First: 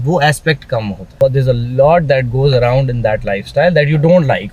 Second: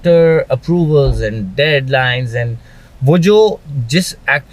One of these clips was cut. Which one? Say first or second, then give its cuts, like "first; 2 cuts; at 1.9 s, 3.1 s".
first; 1 cut; at 1.1 s